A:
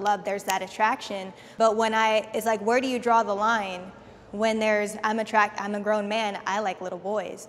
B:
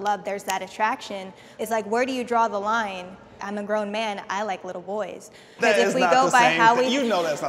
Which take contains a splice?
B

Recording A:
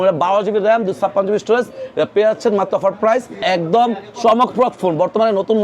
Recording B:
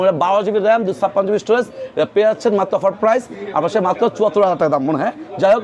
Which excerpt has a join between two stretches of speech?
A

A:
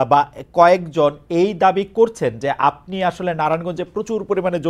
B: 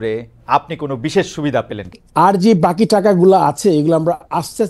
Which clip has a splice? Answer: B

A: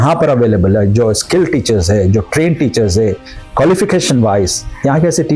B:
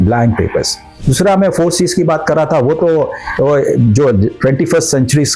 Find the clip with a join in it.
B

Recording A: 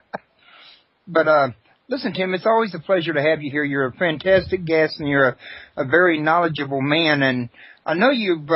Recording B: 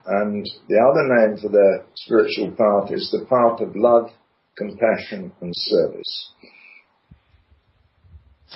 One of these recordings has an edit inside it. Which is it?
B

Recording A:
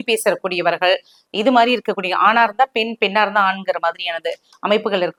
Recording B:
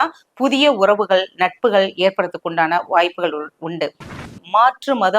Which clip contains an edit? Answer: B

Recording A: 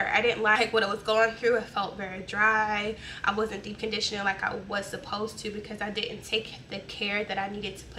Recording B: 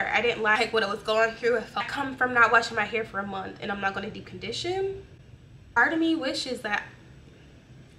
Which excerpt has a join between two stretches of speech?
B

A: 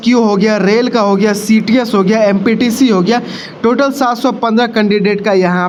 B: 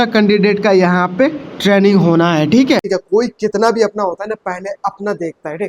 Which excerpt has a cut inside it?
B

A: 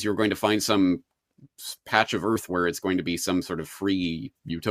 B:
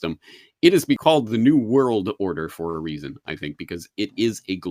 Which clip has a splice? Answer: B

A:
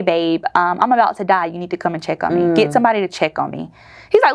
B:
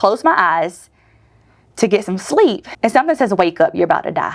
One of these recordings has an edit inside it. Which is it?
B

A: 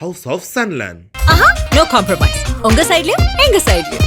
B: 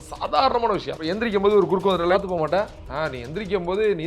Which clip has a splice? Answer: B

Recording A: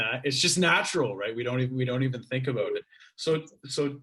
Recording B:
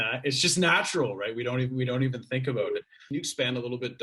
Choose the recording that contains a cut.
B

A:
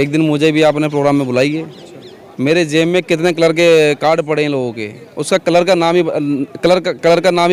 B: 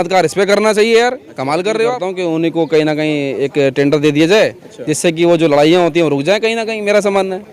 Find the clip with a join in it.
B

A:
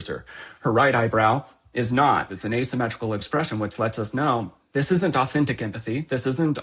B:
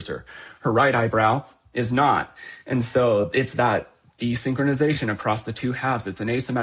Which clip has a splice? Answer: A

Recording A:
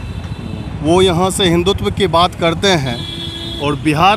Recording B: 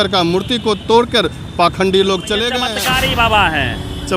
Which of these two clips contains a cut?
B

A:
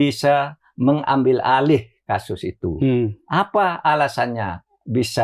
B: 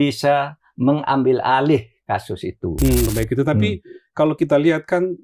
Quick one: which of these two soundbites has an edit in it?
B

